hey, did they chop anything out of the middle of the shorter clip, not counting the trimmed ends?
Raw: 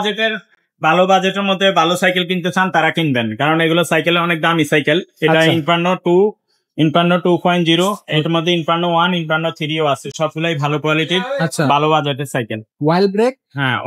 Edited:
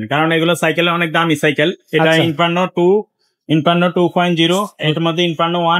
no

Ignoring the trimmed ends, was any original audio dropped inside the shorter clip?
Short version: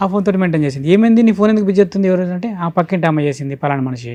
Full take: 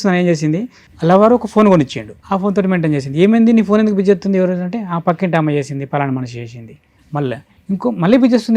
no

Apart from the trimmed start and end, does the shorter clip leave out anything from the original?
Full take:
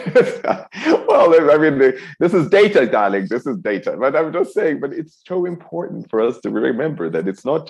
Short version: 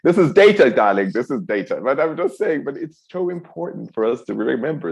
no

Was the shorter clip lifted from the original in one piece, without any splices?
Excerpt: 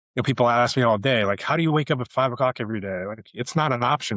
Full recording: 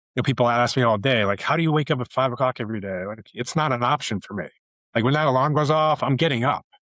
yes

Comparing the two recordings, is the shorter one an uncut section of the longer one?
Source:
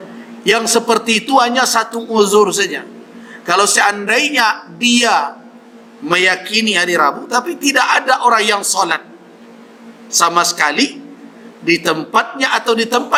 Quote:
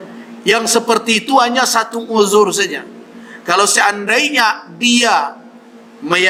yes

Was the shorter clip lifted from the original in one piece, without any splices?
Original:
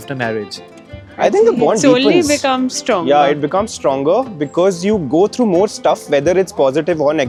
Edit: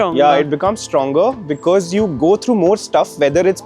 yes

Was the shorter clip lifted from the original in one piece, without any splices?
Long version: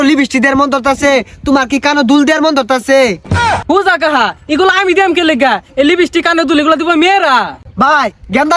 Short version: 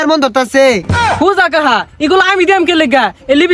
no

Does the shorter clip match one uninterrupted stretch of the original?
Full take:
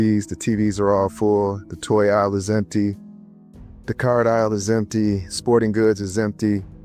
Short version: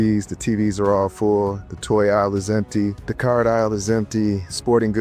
no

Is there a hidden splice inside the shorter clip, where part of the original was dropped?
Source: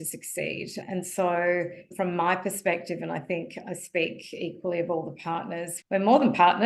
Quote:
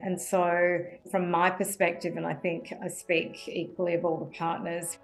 no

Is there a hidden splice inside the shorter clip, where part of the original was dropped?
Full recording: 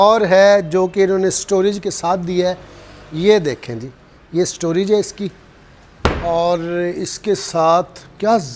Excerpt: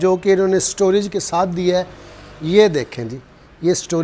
no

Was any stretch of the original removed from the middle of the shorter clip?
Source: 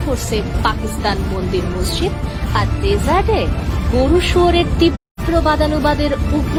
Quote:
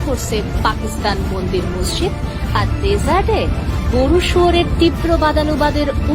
yes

